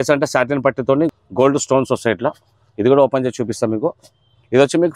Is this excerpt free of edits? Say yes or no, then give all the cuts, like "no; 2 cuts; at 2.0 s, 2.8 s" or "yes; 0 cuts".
yes; 0 cuts